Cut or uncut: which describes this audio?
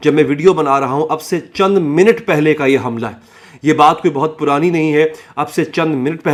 uncut